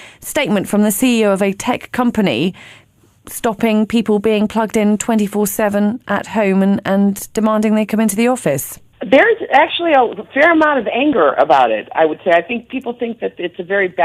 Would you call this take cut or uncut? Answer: cut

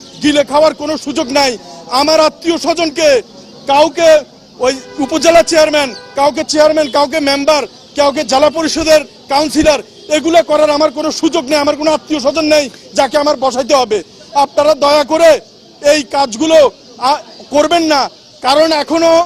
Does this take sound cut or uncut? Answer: uncut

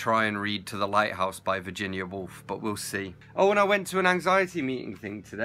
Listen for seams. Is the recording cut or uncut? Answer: cut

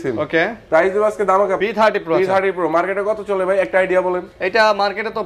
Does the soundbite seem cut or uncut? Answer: cut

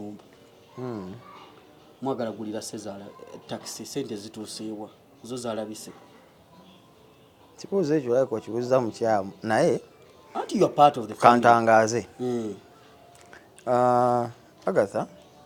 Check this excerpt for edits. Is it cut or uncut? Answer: uncut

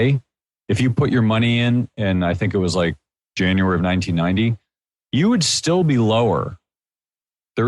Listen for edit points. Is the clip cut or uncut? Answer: cut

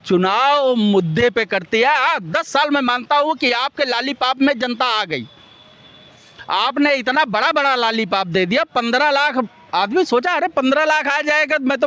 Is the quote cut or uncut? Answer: uncut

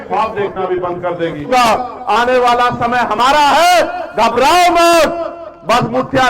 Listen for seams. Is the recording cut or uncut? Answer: cut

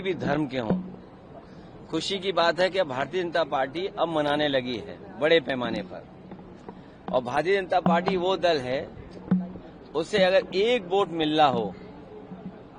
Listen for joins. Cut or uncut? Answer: uncut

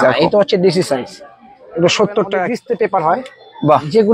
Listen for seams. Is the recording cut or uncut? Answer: cut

